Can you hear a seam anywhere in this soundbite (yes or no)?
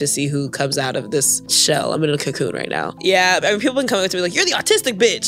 yes